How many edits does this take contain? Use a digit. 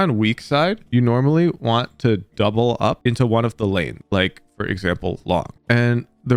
0